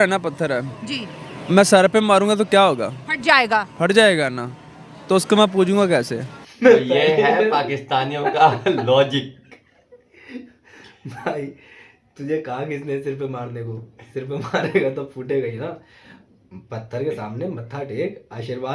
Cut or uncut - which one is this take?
uncut